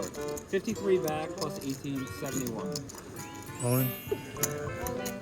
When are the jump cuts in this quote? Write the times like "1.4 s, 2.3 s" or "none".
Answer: 2.9 s

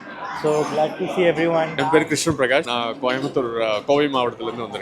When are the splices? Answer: 1.8 s, 2.7 s

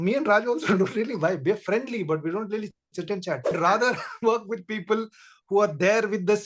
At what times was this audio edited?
3.5 s

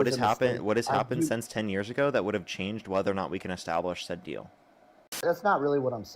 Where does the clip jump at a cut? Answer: 5.2 s

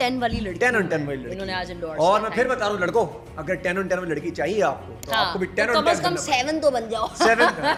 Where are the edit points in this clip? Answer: none

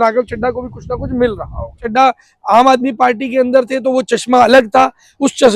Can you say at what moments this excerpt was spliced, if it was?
1.8 s

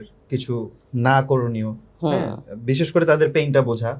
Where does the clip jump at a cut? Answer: none

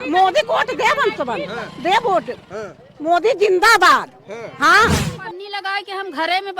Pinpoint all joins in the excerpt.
5.1 s

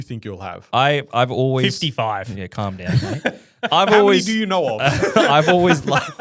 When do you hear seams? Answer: none

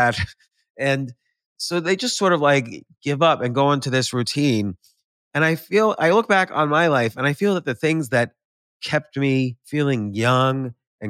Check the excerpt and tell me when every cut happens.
9.6 s

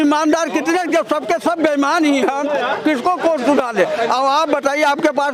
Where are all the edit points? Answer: none

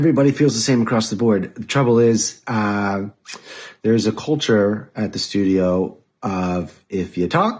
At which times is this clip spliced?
none

